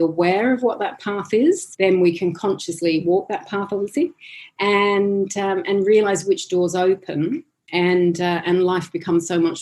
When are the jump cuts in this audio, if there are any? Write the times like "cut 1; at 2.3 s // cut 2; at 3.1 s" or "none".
cut 1; at 1.7 s